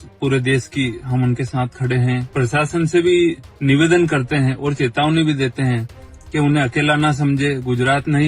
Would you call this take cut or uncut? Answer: cut